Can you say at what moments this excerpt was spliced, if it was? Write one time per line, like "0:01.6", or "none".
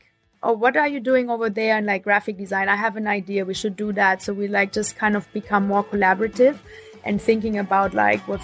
none